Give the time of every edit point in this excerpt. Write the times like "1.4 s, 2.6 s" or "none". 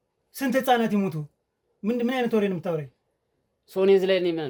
none